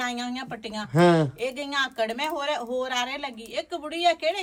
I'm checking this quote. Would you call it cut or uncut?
uncut